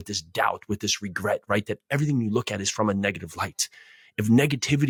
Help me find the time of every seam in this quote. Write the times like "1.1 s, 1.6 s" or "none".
none